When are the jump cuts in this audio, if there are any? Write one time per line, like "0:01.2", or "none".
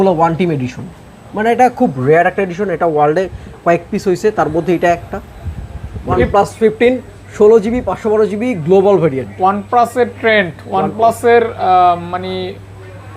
0:06.1